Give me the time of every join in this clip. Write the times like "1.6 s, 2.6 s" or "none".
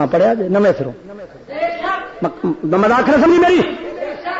none